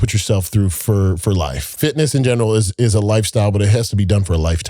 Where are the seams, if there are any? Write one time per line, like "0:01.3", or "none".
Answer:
0:01.8